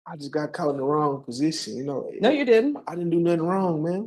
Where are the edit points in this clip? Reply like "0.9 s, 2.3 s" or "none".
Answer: none